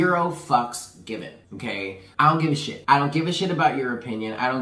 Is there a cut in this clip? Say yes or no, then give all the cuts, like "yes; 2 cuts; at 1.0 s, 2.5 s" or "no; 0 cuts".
yes; 2 cuts; at 1.8 s, 2.7 s